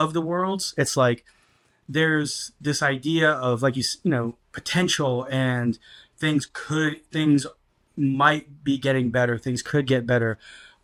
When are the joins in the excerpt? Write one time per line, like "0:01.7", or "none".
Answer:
none